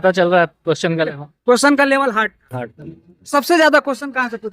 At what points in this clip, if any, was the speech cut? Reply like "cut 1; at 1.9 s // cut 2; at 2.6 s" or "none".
none